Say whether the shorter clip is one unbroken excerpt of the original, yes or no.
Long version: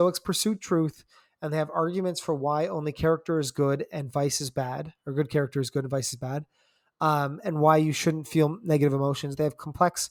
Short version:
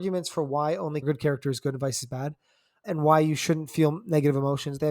no